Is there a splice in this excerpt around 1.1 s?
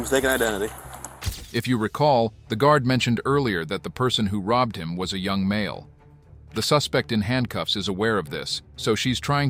no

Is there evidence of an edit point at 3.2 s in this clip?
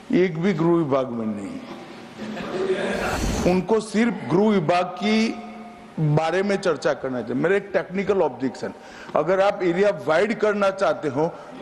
yes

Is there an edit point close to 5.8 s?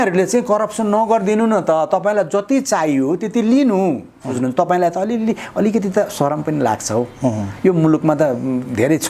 no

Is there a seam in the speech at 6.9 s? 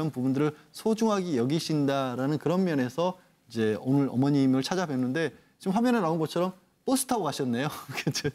yes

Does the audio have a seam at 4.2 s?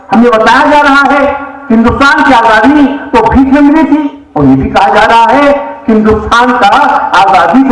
yes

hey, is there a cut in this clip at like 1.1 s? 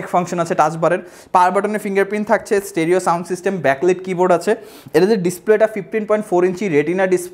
no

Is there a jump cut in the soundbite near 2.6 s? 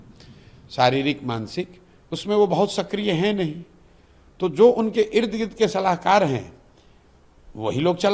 no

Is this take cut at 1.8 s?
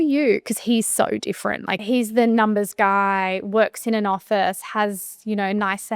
yes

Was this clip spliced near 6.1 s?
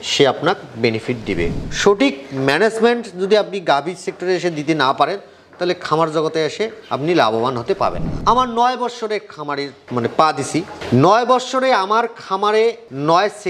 no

